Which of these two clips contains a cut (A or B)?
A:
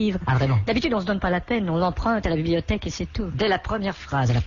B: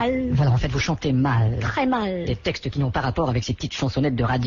A